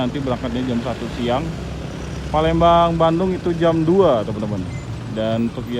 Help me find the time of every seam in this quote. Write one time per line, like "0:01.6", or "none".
none